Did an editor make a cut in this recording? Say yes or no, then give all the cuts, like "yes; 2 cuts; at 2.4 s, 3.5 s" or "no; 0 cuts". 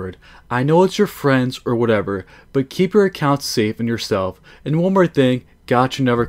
no; 0 cuts